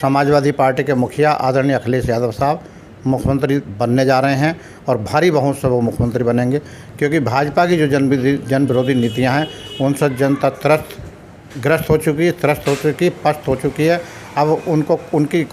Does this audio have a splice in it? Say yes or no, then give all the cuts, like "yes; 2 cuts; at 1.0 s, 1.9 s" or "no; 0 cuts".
no; 0 cuts